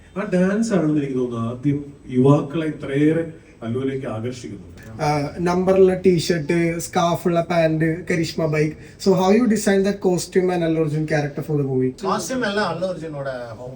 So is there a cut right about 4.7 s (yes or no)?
yes